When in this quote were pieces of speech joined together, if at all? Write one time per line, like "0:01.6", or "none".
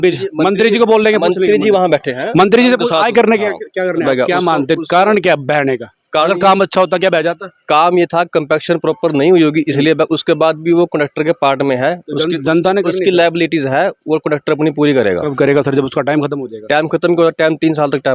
0:04.0